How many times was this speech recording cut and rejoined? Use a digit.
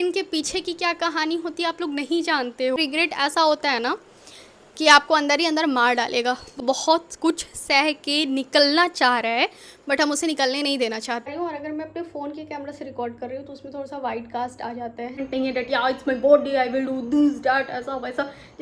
4